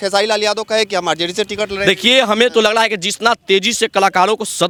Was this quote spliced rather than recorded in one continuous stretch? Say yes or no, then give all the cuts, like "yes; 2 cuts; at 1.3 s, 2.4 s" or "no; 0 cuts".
no; 0 cuts